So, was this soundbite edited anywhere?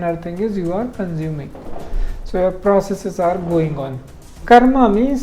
yes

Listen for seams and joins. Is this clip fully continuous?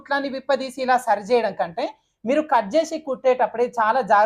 yes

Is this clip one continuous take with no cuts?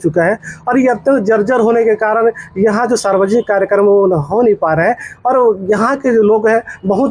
yes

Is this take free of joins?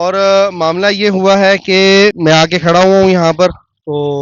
no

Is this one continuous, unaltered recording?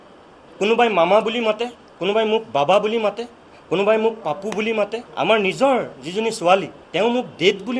no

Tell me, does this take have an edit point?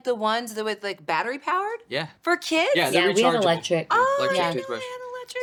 no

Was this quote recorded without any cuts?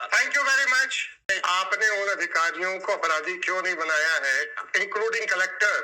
no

